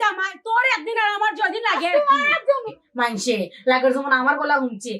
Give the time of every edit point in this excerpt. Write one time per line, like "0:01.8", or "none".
0:02.8